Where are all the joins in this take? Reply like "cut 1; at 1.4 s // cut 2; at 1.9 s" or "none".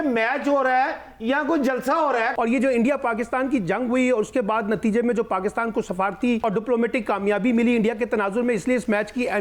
cut 1; at 2.3 s // cut 2; at 6.4 s

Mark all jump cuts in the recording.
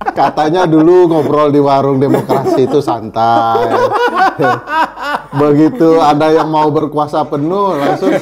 none

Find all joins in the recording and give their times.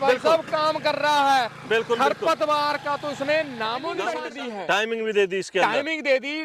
cut 1; at 4.2 s

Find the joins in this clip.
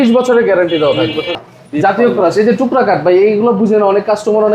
cut 1; at 1.4 s

